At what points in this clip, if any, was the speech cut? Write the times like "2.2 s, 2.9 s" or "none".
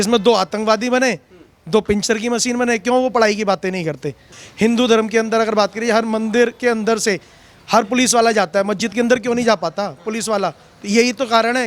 4.4 s